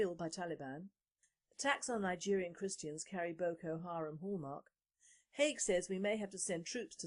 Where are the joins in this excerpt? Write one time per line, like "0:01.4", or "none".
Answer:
none